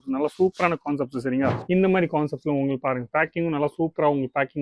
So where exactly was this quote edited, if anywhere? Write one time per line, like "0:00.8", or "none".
0:01.6